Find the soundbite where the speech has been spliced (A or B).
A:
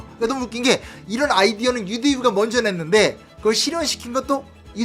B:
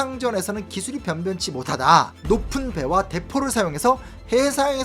B